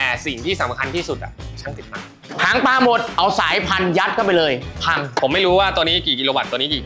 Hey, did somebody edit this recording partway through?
yes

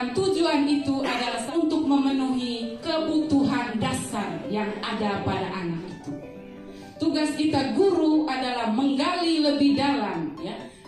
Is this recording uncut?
no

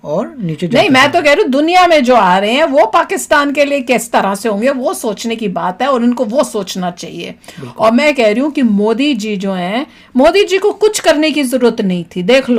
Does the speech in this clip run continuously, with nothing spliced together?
yes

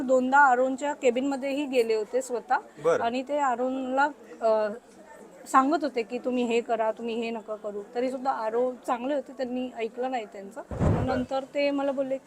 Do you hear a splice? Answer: yes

